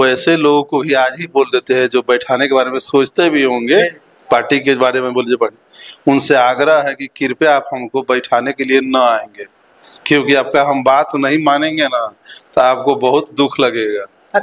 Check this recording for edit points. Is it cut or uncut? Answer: uncut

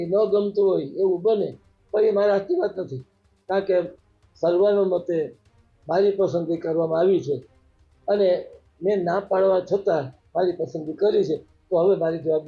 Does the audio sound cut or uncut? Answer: uncut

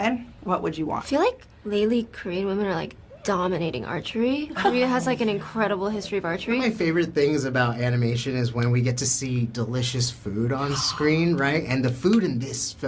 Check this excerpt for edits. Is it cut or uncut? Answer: cut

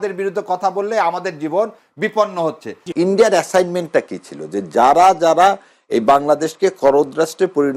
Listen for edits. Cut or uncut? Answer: cut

